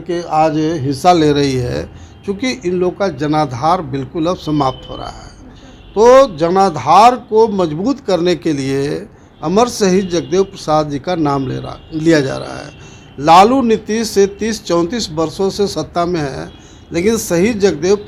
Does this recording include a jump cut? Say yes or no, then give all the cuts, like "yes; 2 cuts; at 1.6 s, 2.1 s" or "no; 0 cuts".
no; 0 cuts